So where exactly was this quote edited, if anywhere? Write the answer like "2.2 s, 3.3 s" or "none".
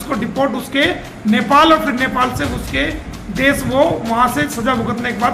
none